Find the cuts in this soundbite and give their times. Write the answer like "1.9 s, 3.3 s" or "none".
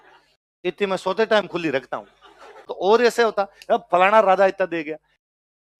2.7 s